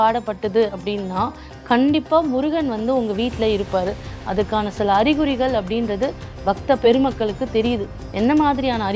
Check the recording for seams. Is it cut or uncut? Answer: uncut